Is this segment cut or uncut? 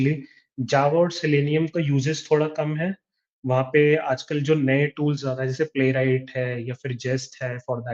uncut